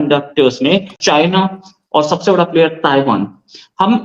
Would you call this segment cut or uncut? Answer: cut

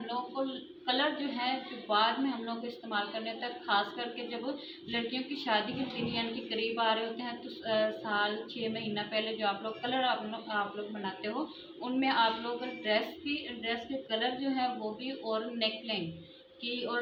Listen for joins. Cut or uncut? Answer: uncut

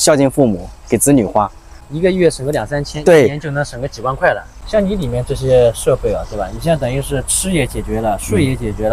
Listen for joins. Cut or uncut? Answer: uncut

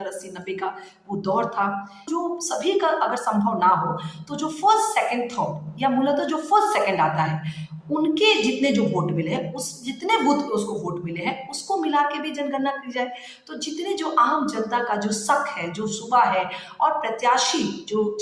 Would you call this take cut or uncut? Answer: cut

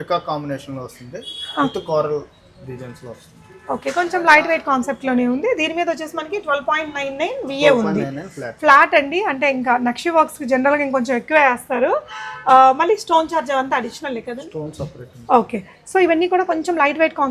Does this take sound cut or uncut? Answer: uncut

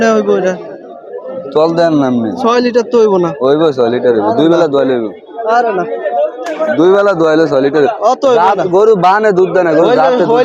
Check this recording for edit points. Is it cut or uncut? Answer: uncut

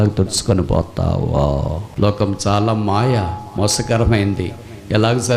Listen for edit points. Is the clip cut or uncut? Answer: cut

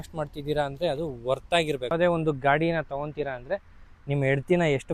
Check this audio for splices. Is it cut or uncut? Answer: cut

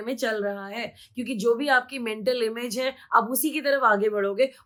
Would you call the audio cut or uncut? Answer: uncut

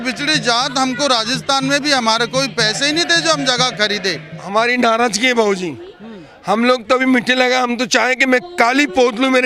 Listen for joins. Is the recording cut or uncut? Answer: cut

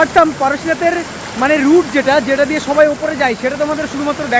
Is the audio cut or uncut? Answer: uncut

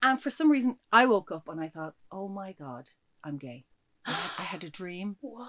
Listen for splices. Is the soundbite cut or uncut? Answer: uncut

